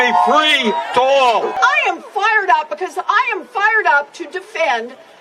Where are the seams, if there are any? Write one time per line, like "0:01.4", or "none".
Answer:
0:01.6